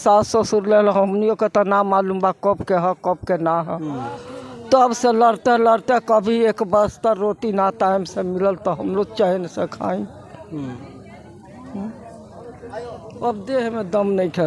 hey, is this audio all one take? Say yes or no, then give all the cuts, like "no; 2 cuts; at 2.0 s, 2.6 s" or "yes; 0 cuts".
yes; 0 cuts